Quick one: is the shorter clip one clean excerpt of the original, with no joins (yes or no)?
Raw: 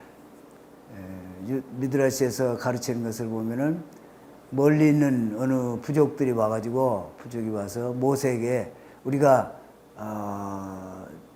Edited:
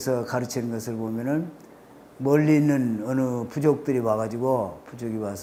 yes